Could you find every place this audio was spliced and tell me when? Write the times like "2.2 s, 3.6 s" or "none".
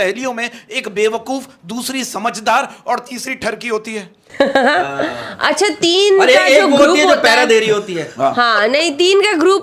none